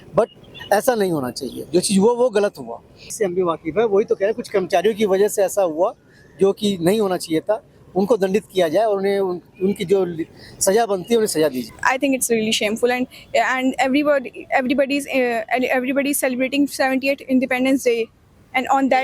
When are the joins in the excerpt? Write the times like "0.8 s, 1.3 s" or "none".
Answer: 3.1 s, 11.7 s